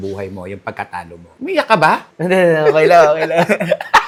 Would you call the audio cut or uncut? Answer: uncut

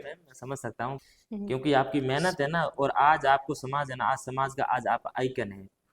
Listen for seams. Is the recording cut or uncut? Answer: cut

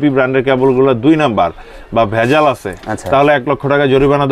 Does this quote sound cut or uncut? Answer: uncut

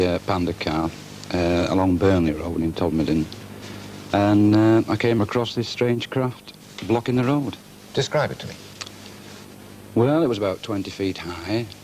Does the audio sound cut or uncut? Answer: cut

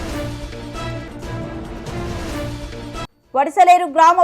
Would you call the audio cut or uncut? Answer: cut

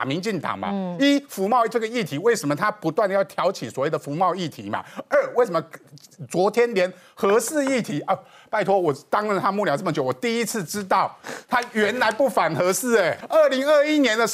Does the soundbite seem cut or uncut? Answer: cut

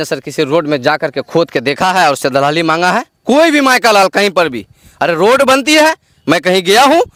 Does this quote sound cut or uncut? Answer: uncut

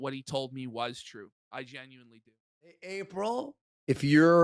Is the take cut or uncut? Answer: cut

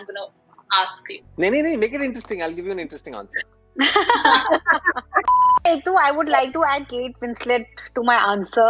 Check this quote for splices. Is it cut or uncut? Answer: cut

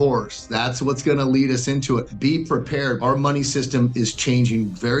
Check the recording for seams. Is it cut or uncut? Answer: cut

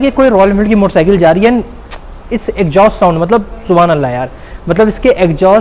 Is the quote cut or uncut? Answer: uncut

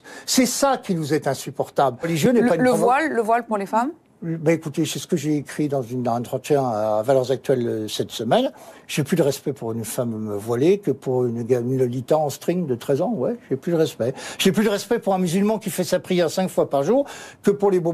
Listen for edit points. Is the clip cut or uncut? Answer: cut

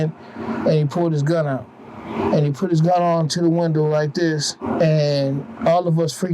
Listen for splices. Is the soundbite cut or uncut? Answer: cut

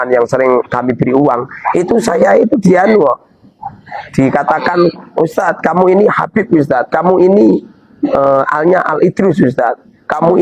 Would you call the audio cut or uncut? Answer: uncut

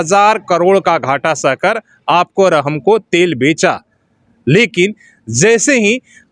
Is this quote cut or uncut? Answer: uncut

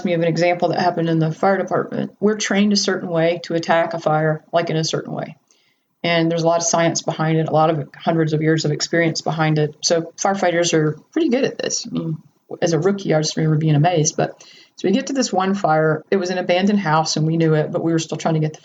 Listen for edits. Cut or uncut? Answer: cut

